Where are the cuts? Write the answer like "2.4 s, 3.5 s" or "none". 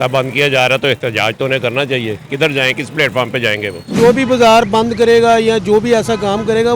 3.9 s